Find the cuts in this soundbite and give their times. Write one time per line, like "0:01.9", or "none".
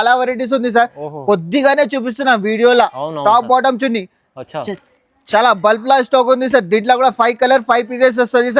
none